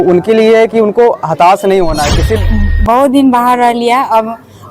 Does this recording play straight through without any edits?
no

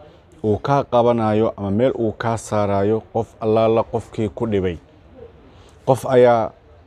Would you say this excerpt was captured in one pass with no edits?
yes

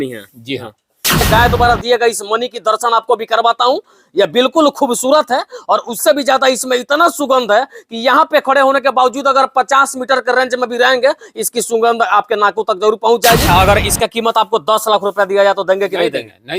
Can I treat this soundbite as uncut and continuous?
no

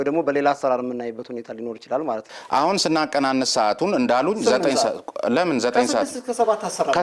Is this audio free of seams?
no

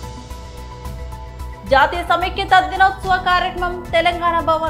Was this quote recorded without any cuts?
yes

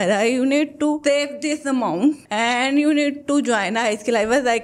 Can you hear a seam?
no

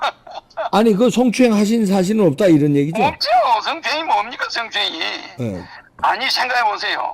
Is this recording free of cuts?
no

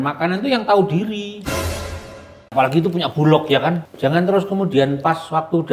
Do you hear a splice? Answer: yes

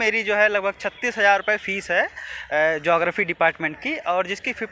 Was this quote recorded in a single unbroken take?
yes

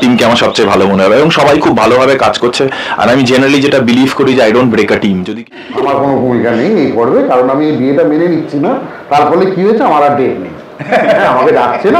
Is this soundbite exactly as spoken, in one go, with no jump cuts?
no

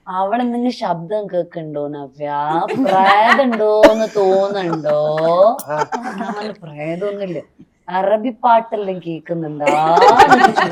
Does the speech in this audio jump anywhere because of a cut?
no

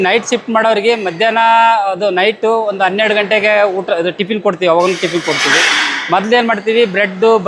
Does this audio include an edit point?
no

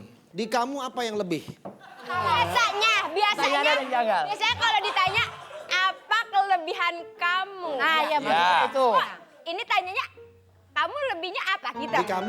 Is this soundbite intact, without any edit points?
no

